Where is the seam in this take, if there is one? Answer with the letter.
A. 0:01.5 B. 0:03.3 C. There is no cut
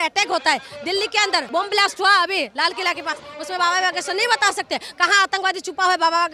A